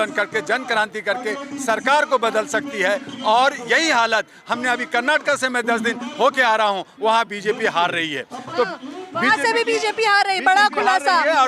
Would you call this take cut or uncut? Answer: uncut